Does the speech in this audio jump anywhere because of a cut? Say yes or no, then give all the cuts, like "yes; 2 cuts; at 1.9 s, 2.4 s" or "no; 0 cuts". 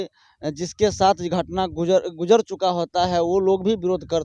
no; 0 cuts